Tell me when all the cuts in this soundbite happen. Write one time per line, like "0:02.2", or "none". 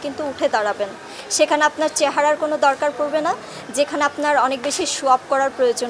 none

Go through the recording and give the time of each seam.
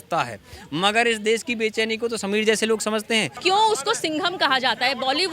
0:03.3

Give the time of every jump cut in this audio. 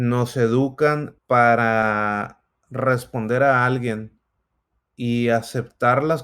0:01.1

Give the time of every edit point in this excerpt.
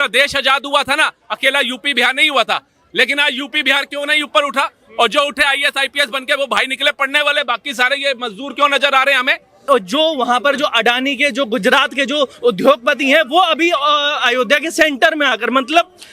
0:09.6

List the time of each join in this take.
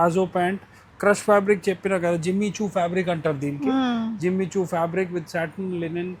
none

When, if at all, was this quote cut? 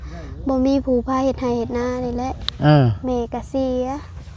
none

